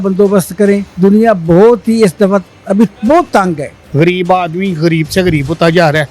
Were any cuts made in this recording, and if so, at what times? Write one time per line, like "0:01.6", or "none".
0:00.9
0:03.8